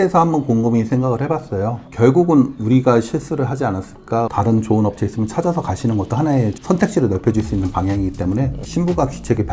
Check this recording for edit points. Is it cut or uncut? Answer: cut